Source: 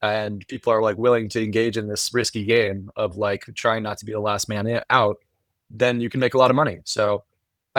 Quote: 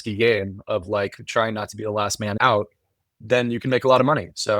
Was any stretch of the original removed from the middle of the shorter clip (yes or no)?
yes